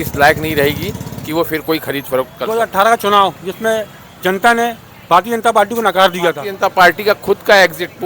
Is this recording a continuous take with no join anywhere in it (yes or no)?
no